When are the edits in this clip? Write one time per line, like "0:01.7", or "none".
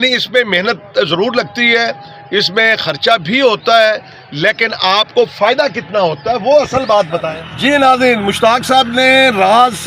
0:07.2

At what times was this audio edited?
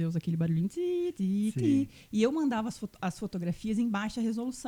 none

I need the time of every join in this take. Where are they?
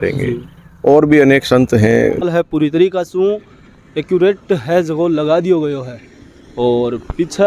0:02.3

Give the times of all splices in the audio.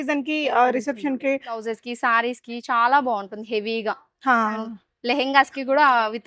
0:01.6

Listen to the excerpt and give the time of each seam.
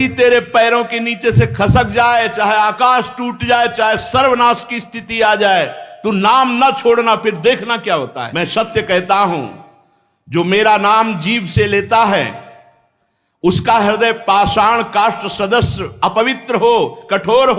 0:08.2

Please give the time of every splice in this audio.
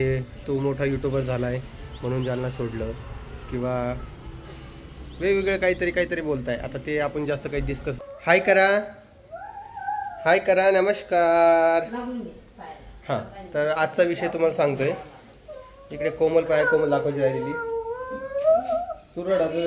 0:07.9

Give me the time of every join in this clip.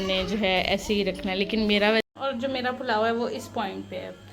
0:02.0

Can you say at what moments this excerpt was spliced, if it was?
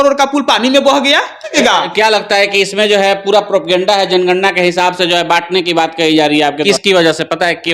0:01.5
0:06.6

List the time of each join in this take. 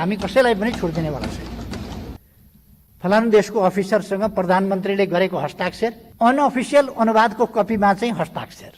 0:02.2
0:06.0

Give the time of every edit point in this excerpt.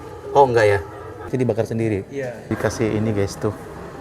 0:01.3

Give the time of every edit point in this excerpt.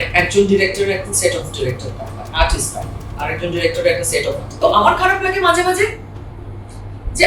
0:04.4

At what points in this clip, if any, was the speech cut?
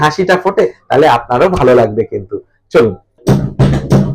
0:03.2

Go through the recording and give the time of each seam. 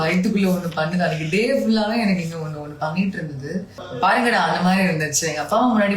0:03.9

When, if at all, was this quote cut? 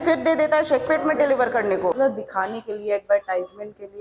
0:02.0

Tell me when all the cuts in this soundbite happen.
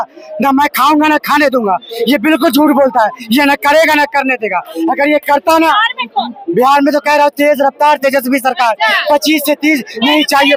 none

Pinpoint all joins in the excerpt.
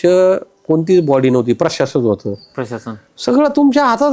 none

